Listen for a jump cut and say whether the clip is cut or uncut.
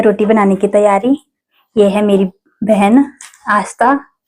uncut